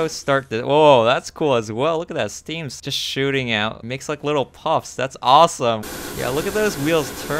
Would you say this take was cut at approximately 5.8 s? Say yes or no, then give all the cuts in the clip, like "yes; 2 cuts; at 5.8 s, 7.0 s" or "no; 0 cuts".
yes; 2 cuts; at 3.8 s, 5.8 s